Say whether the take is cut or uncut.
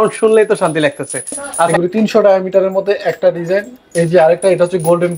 cut